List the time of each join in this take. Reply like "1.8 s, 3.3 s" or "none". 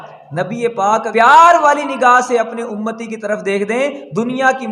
1.1 s